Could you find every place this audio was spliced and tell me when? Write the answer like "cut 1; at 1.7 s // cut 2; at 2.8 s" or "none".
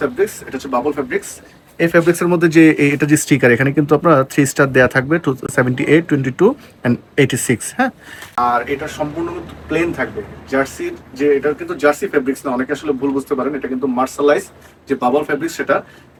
none